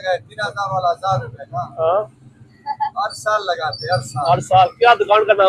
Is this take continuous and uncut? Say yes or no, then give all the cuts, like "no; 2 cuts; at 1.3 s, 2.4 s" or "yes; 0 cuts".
yes; 0 cuts